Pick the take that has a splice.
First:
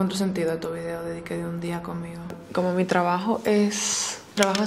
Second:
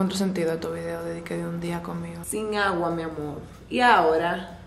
second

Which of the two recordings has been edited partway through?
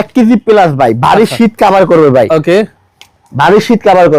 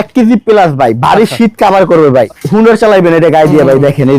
second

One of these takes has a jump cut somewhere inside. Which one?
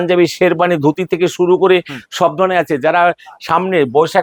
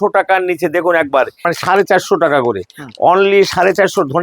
second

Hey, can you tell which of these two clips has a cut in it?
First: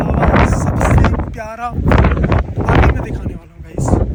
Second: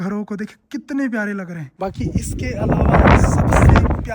second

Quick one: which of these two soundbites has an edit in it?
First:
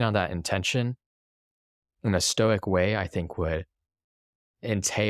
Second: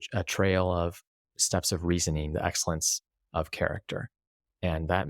first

